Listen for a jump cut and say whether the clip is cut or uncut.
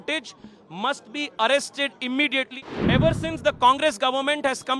cut